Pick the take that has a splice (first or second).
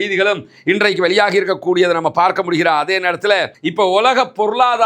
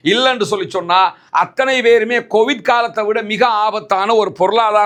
first